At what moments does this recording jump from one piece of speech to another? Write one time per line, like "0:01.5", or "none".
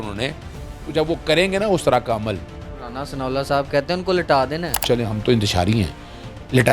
0:04.7